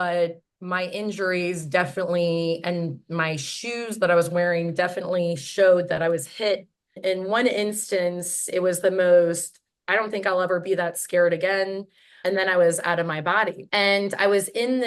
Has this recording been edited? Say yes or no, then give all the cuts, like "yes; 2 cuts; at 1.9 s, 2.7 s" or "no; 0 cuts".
yes; 3 cuts; at 7.0 s, 12.1 s, 13.6 s